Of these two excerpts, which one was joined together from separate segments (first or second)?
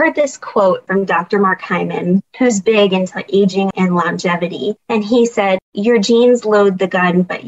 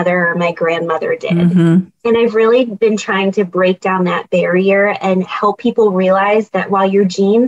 first